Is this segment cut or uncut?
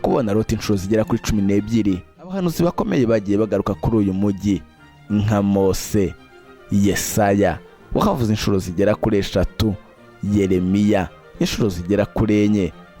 cut